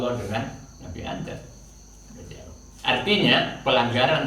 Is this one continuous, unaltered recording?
yes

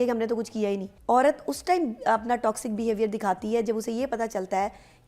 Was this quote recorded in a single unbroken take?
no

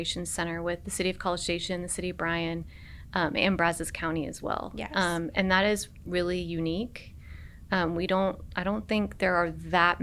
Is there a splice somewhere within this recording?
no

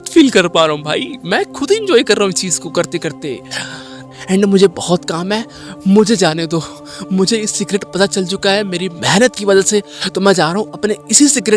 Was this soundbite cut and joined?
yes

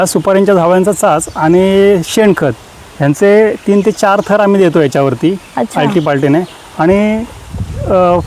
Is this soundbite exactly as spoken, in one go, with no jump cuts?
yes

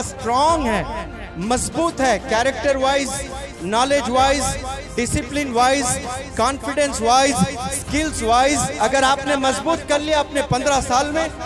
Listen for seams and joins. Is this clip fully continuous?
yes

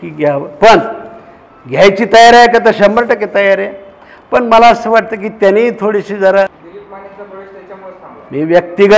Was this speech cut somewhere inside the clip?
yes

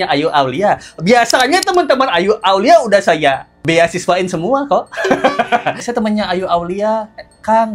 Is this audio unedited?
no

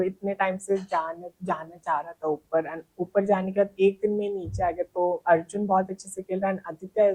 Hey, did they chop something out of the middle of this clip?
yes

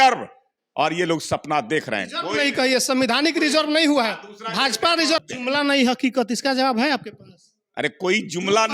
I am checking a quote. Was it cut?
yes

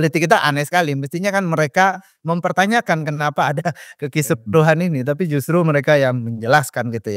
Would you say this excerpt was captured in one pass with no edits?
yes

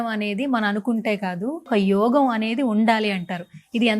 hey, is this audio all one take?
no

